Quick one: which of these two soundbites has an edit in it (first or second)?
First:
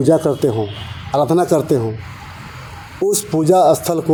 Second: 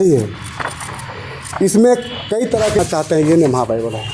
second